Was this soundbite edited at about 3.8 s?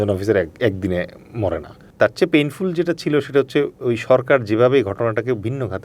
no; 1 cut; at 1.9 s

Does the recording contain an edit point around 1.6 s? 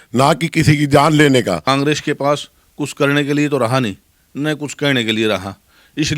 yes; 1 cut; at 1.6 s

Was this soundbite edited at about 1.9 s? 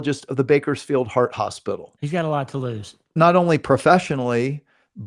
yes; 2 cuts; at 1.9 s, 3.1 s

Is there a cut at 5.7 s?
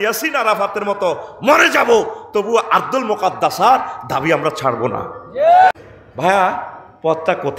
yes; 1 cut; at 5.7 s

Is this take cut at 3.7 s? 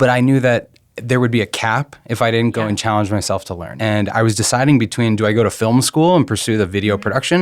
yes; 1 cut; at 3.7 s

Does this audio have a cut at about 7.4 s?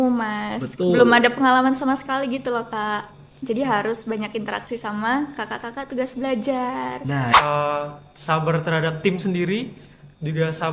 yes; 1 cut; at 7.4 s

